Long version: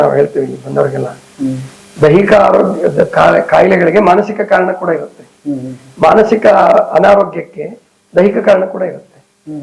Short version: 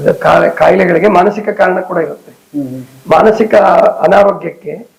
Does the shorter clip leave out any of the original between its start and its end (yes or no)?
no